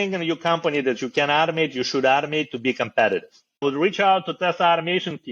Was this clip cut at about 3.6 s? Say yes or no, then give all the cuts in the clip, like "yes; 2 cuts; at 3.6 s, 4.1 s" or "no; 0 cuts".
yes; 1 cut; at 3.6 s